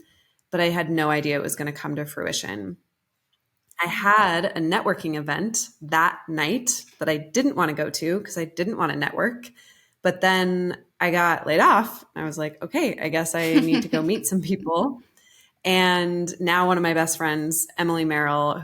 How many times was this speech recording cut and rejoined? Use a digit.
0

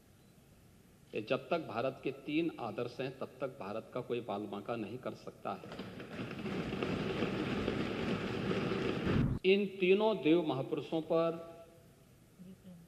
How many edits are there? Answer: 1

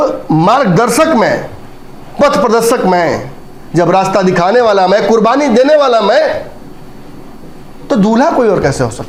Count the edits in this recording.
0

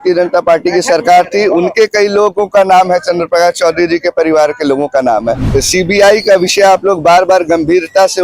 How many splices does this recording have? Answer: 1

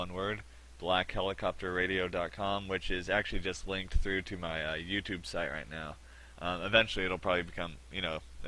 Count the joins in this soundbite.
1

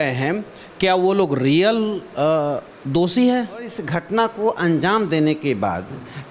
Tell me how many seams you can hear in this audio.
1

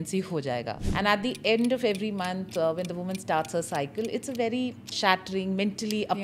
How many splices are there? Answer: 2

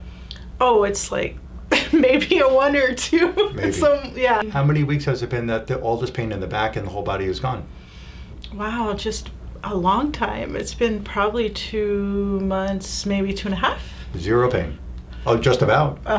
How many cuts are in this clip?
1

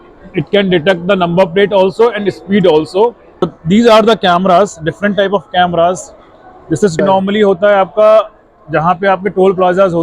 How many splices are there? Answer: 2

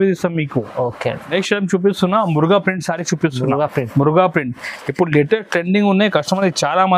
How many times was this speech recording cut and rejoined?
0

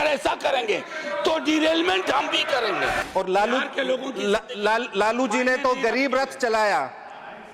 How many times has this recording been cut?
1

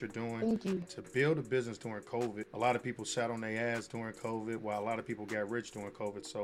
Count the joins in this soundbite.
2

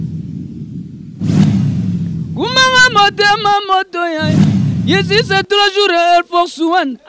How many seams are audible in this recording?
1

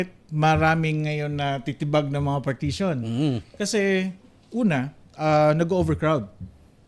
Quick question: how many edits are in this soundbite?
0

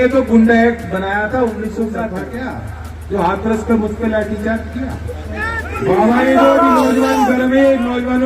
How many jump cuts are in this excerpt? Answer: 2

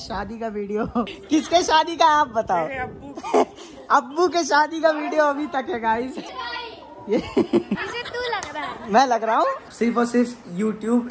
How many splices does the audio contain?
4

